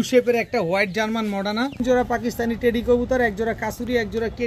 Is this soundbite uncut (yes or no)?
no